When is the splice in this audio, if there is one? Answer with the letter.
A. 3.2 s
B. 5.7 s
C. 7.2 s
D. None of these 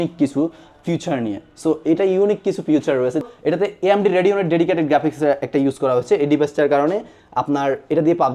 A